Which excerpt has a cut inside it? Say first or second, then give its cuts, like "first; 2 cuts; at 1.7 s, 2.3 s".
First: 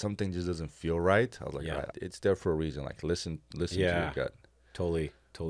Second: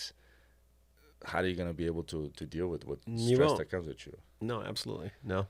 first; 1 cut; at 1.9 s